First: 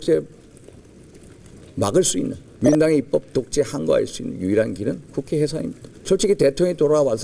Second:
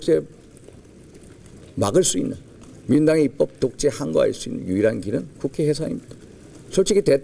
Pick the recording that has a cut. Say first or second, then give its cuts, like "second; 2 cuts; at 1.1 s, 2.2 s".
first; 2 cuts; at 2.4 s, 5.9 s